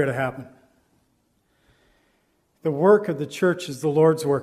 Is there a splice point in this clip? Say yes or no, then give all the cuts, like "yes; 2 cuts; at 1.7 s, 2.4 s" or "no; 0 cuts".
no; 0 cuts